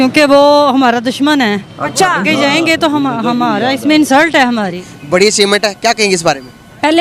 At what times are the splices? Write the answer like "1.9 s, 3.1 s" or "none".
4.8 s